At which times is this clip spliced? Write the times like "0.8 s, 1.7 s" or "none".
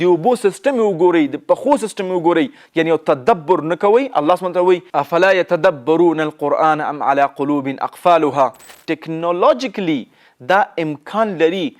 2.6 s, 8.8 s